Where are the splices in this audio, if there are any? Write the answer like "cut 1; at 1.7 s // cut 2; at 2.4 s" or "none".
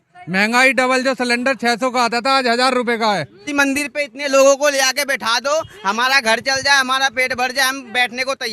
cut 1; at 3.5 s